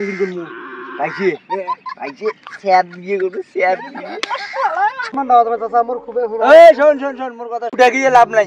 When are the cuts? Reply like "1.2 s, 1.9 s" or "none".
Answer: 5.1 s